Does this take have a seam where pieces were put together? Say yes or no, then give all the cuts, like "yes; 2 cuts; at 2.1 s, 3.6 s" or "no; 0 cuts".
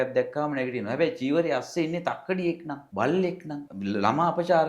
yes; 2 cuts; at 2.8 s, 3.7 s